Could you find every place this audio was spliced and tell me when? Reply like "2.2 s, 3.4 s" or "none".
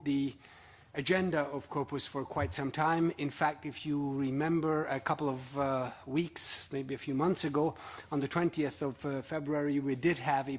9.6 s